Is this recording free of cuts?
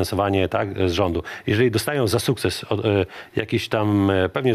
yes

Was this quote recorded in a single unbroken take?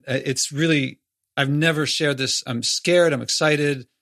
no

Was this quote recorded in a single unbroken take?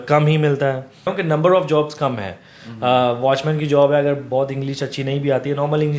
no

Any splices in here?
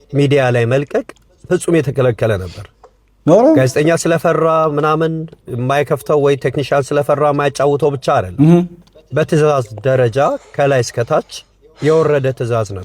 no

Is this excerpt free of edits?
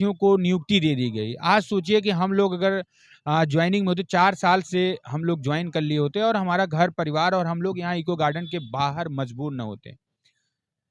yes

